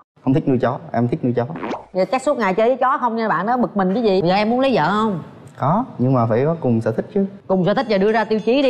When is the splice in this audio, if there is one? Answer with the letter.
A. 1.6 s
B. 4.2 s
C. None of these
B